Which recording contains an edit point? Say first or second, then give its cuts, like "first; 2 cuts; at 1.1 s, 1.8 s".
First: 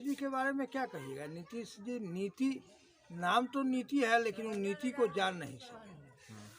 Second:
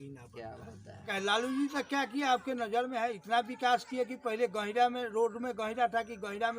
second; 1 cut; at 1.1 s